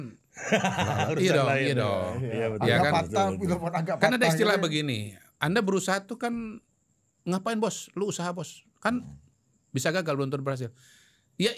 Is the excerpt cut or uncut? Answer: uncut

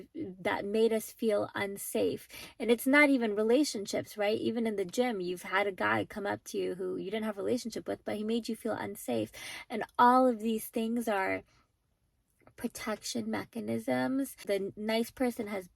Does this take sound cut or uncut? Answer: cut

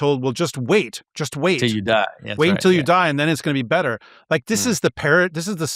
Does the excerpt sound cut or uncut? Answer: uncut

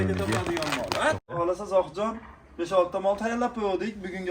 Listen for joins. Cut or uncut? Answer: cut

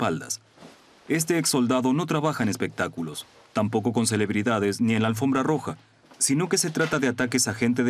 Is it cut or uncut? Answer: cut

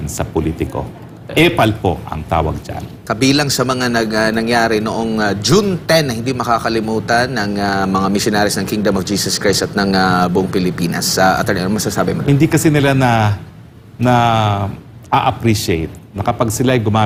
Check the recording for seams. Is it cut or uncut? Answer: uncut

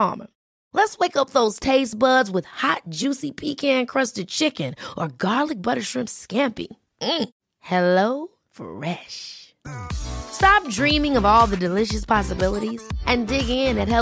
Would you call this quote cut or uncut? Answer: uncut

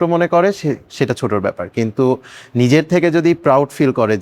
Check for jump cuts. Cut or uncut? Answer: uncut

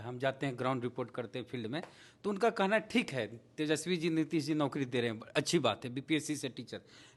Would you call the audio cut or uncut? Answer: uncut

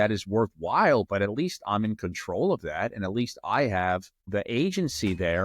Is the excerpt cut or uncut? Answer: cut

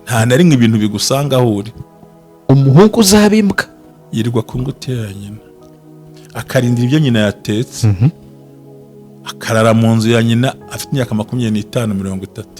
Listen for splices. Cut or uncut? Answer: cut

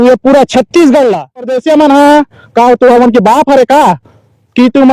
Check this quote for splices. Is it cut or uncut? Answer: cut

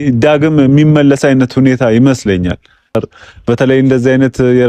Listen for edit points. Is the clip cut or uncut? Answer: cut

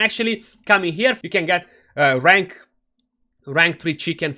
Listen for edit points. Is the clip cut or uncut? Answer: cut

